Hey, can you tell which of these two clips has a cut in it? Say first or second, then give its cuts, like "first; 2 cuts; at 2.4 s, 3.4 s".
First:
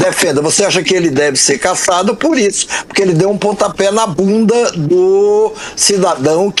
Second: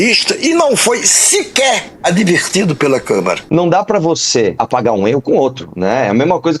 second; 2 cuts; at 3.4 s, 4.6 s